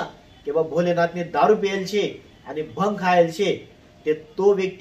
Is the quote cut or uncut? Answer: uncut